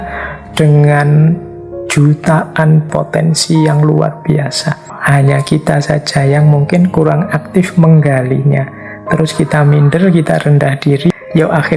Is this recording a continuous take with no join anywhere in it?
no; 3 cuts; at 2.9 s, 4.9 s, 11.1 s

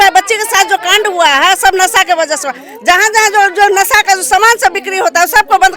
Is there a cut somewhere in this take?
no; 0 cuts

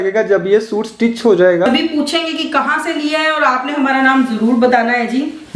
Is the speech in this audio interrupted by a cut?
yes; 1 cut; at 1.7 s

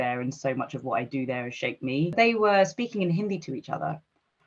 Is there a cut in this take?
yes; 1 cut; at 2.1 s

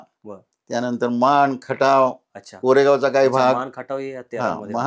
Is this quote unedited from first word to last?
yes; 0 cuts

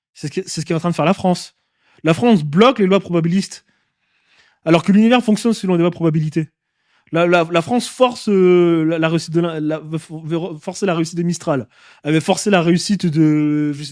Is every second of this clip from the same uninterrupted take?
yes; 0 cuts

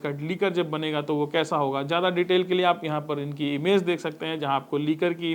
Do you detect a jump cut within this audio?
no; 0 cuts

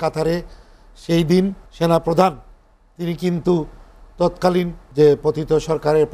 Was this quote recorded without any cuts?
no; 2 cuts; at 1.6 s, 4.8 s

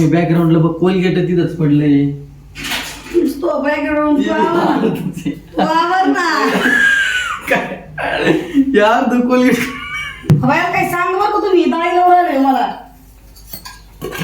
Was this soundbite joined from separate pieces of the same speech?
yes; 1 cut; at 10.1 s

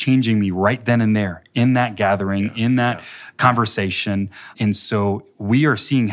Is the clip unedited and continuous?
no; 1 cut; at 4.5 s

